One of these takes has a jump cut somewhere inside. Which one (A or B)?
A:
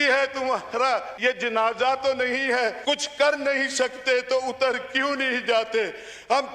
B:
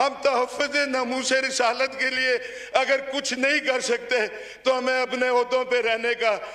A